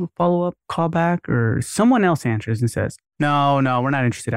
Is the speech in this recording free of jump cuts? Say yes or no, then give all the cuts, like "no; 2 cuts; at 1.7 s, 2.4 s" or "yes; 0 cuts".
yes; 0 cuts